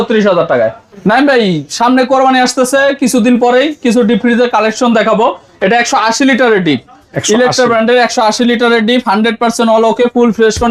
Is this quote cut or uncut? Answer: uncut